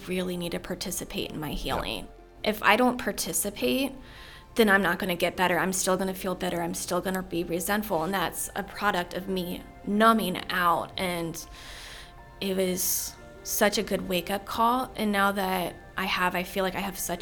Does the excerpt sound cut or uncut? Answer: cut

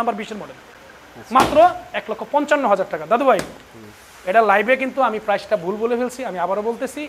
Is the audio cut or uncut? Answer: uncut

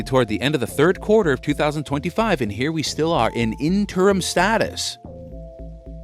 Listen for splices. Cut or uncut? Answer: cut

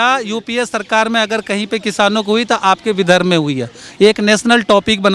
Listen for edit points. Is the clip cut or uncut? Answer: uncut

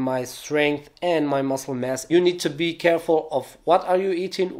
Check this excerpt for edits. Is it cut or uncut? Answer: cut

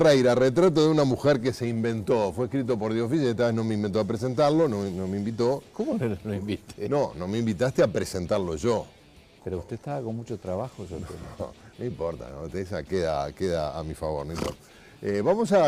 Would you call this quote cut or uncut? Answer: cut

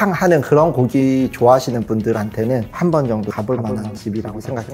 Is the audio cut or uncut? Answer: uncut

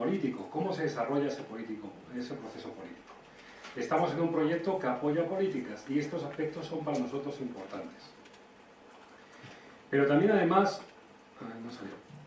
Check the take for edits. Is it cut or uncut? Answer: cut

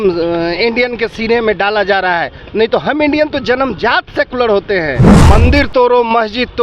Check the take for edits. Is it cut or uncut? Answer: cut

